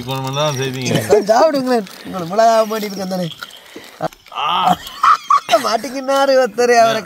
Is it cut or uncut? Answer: cut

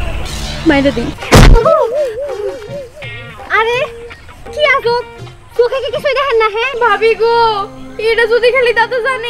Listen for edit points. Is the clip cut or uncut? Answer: cut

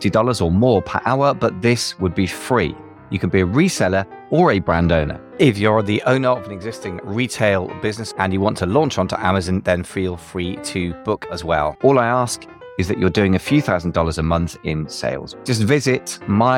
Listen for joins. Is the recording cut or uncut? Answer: cut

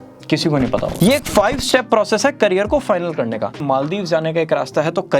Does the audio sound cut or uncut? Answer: cut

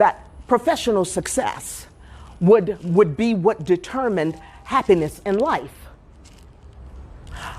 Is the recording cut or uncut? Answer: uncut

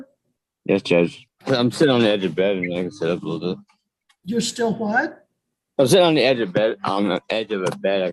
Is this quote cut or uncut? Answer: cut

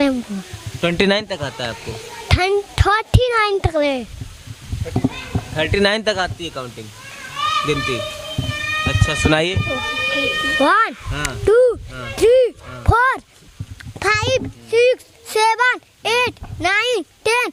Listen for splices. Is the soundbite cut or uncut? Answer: uncut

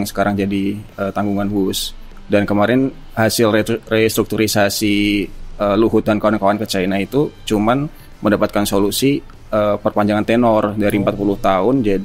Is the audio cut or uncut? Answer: uncut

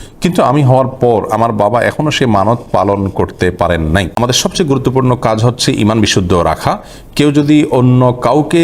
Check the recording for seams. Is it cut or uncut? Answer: cut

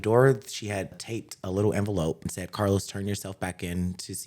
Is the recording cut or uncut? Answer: cut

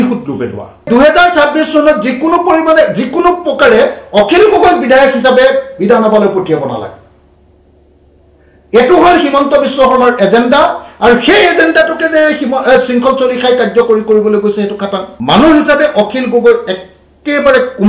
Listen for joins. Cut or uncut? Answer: cut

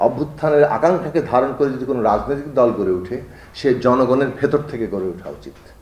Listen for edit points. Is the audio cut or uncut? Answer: uncut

